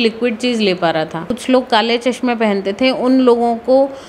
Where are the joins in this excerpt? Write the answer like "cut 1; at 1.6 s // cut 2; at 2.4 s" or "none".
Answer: cut 1; at 1.3 s